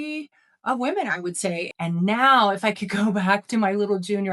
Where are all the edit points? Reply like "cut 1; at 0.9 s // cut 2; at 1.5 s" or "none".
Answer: cut 1; at 1.7 s